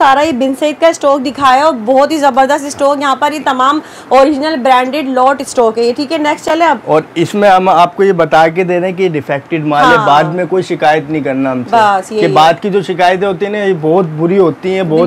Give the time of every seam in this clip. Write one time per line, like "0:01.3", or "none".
none